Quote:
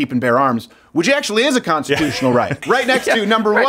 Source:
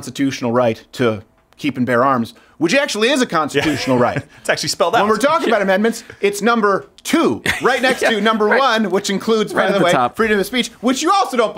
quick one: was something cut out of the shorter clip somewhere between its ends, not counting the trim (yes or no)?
yes